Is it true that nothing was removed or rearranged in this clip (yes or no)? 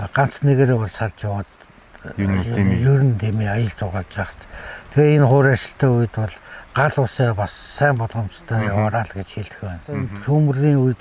no